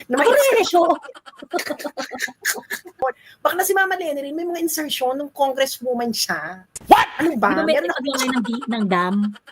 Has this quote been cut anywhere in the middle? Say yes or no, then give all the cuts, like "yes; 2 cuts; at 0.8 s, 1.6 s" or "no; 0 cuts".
yes; 1 cut; at 3.0 s